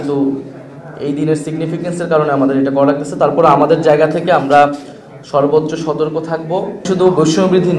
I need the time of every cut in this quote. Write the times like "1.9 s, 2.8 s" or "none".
6.8 s